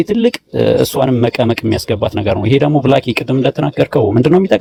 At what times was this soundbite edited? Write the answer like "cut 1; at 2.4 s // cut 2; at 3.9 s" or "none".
none